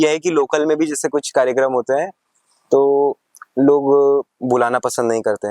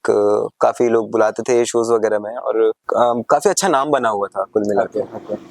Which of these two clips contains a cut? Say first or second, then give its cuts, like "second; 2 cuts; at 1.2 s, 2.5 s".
second; 1 cut; at 2.8 s